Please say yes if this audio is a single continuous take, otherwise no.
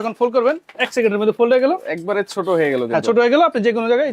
yes